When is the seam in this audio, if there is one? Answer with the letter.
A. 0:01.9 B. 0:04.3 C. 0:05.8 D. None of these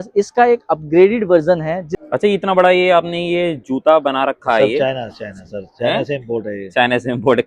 A